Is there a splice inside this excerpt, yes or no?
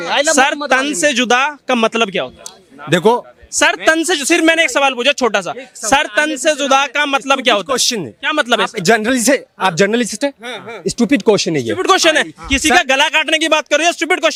no